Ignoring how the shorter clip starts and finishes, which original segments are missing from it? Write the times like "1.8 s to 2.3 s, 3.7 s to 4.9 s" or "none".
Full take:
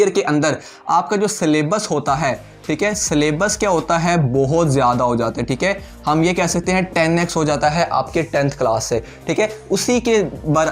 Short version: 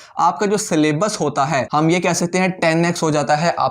2.4 s to 6.0 s